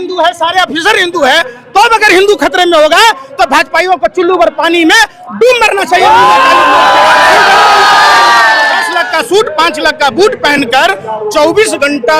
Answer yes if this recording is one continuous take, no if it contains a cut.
no